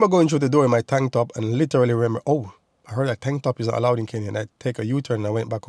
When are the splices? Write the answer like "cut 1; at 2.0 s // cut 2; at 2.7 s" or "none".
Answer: none